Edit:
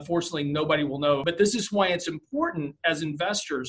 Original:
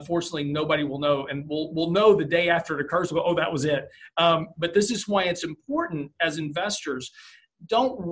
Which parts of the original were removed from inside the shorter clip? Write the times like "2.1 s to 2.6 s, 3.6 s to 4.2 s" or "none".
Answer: 1.2 s to 4.6 s

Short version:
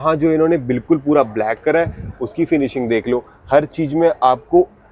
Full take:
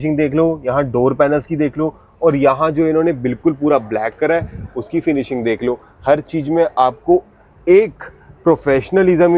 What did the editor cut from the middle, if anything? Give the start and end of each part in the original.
none

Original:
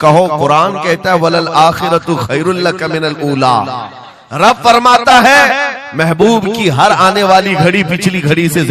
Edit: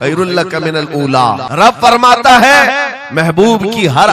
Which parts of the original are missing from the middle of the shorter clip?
3.7 s to 4.3 s

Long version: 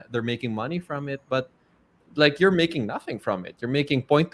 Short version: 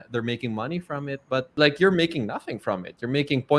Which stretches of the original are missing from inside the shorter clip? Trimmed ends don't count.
1.5 s to 2.1 s

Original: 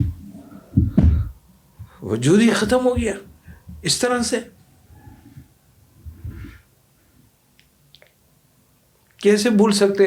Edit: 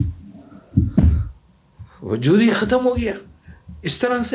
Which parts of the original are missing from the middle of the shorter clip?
none

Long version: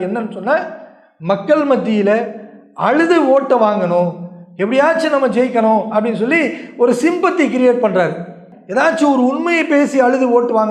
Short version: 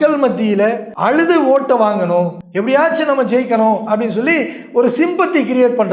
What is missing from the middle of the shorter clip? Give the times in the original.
2.4 s to 2.7 s, 4.2 s to 4.5 s

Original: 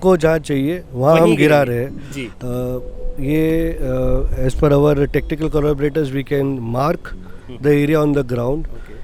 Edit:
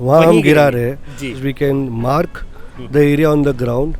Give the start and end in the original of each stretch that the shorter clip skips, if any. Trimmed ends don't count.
2.3 s to 6.1 s

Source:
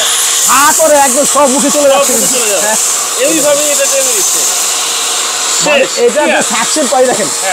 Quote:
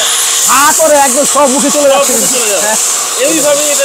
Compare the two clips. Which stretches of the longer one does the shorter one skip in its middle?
none

